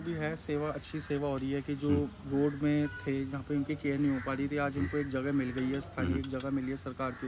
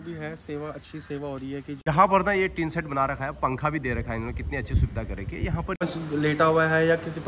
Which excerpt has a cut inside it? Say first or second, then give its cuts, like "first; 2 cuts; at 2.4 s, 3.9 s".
second; 2 cuts; at 1.9 s, 5.8 s